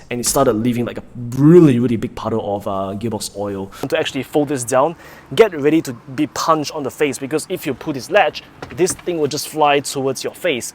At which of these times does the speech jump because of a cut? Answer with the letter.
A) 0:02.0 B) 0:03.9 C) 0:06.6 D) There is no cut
B